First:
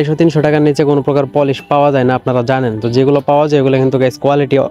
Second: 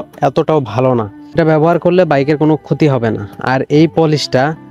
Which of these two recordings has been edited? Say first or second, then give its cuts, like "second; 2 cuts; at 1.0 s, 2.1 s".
second; 1 cut; at 1.4 s